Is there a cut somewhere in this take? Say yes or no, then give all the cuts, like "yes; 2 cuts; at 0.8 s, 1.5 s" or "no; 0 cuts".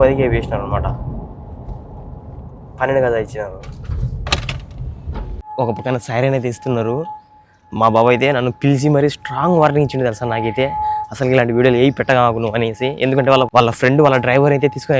yes; 2 cuts; at 5.4 s, 13.5 s